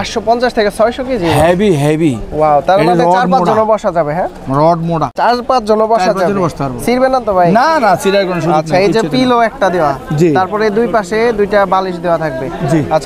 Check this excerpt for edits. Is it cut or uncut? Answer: uncut